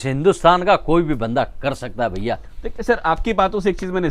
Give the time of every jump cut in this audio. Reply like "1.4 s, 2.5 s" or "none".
none

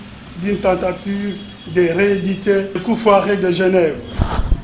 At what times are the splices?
2.8 s

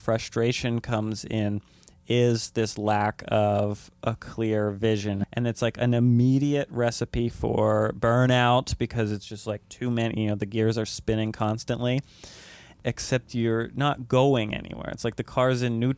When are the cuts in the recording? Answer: none

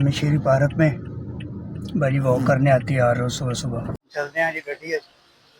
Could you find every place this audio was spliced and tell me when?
4.1 s

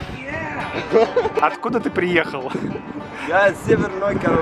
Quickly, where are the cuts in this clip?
1.4 s

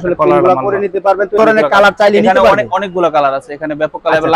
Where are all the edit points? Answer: 1.4 s

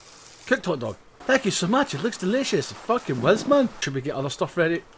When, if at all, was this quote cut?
1.1 s, 3.9 s

